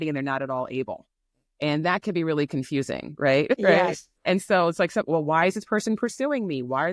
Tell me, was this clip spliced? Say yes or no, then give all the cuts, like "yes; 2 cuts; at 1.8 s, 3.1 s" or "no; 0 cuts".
no; 0 cuts